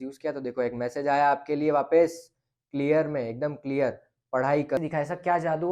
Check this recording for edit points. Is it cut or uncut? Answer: cut